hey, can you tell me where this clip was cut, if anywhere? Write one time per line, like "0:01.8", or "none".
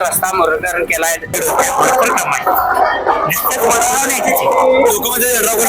0:01.3